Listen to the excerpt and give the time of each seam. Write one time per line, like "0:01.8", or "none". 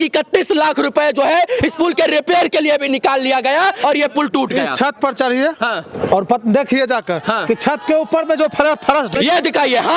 0:03.8
0:09.1